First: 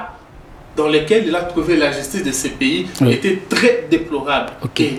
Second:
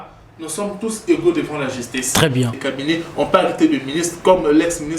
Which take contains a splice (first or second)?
second